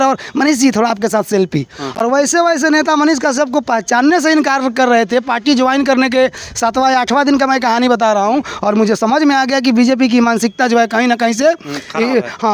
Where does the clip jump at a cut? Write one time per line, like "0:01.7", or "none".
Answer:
none

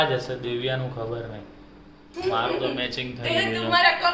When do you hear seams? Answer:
none

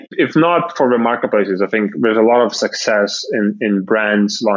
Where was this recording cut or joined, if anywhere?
none

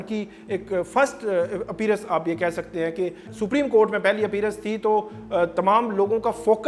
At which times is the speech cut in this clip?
none

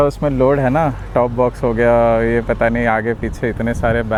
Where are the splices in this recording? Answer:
none

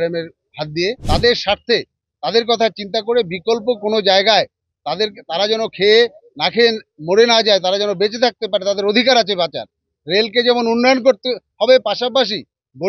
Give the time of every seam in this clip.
0:01.0

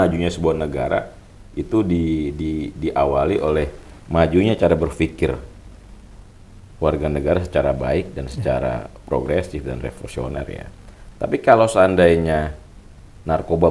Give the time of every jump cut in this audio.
none

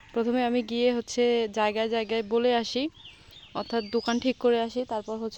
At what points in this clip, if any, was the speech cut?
none

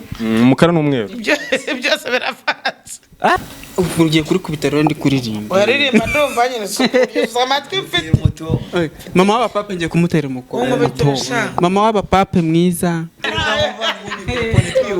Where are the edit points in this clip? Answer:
0:03.4
0:13.3

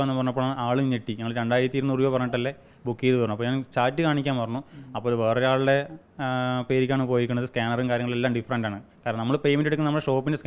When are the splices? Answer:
none

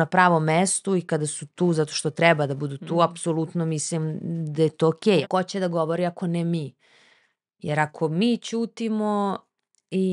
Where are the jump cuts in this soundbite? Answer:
0:05.2

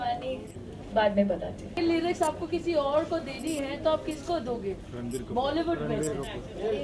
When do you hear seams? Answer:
0:01.8

